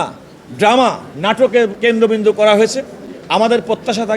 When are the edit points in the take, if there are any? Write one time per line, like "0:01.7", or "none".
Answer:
0:01.8